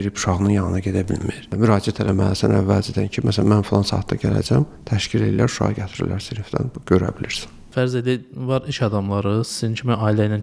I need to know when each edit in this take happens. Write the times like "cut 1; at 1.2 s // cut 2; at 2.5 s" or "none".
none